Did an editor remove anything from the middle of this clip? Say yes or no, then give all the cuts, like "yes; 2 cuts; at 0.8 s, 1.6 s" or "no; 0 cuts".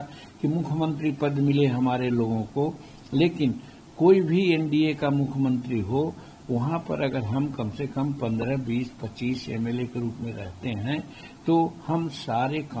no; 0 cuts